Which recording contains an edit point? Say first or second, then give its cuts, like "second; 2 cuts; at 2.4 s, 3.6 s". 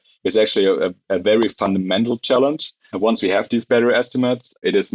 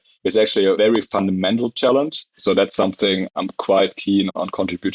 second; 2 cuts; at 0.8 s, 2.3 s